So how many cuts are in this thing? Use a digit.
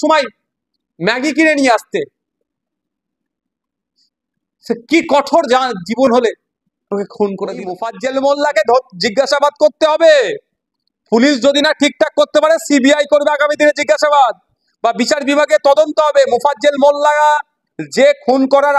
1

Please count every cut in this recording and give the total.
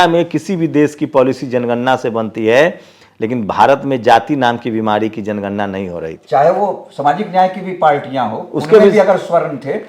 1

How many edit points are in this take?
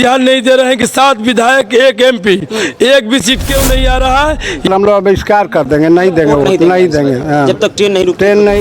1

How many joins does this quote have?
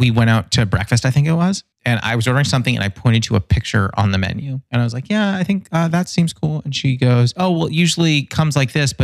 0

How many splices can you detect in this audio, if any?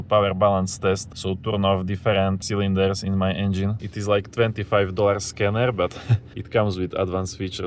3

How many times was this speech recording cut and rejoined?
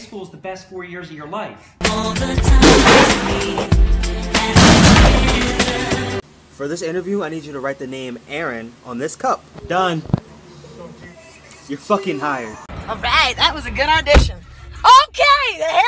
1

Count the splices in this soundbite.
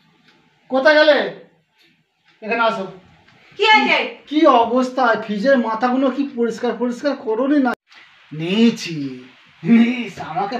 1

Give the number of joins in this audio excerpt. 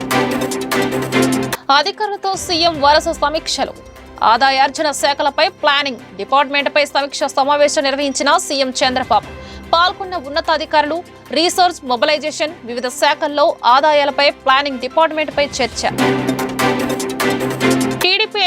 1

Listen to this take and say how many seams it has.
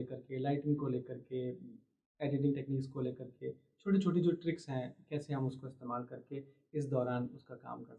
0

